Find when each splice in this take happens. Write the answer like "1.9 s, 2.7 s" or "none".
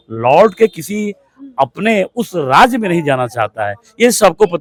none